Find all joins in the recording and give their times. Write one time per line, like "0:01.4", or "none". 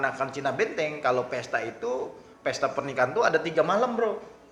none

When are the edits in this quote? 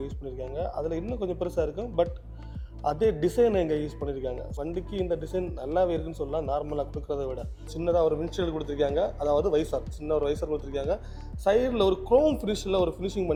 none

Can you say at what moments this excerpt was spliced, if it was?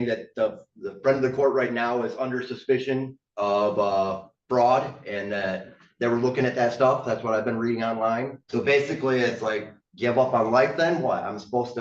0:08.4

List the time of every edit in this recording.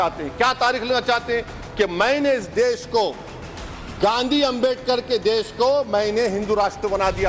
0:02.0

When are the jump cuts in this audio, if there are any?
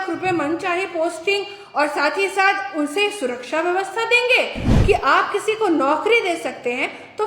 0:04.7

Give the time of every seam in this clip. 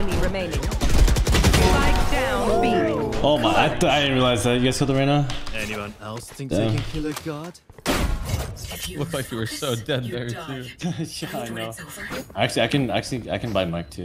0:12.0

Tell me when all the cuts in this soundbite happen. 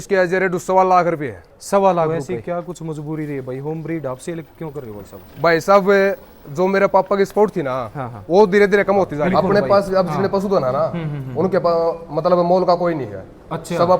0:02.1
0:09.2

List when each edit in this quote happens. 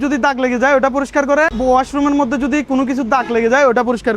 0:01.5

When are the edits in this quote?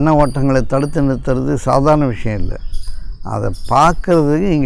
none

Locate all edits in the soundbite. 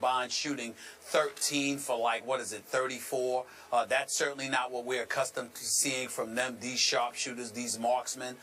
0:07.1

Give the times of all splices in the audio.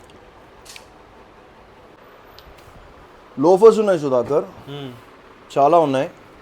0:02.0

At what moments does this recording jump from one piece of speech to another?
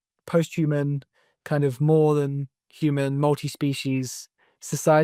none

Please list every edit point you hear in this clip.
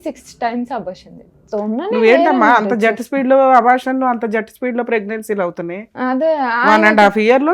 0:01.4

